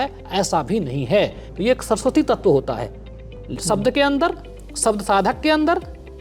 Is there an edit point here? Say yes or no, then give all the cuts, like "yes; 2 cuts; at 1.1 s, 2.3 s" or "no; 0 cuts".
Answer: yes; 1 cut; at 1.4 s